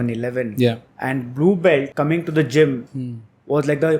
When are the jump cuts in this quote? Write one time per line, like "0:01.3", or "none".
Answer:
0:01.9